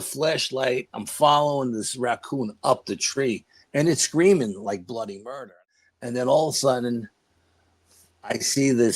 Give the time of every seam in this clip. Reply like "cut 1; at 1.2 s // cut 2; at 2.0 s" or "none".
cut 1; at 5.6 s